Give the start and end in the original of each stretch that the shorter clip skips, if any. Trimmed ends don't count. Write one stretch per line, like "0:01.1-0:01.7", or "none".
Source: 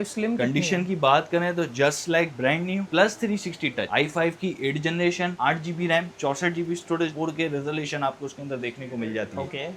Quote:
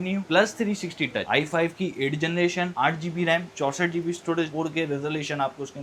none